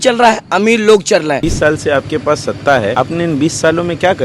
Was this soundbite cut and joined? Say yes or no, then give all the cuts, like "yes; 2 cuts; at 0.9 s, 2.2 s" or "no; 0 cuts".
yes; 2 cuts; at 1.5 s, 2.9 s